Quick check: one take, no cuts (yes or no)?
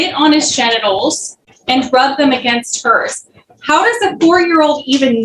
yes